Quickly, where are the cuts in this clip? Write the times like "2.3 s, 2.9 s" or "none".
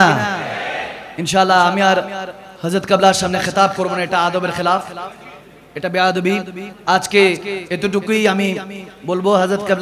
none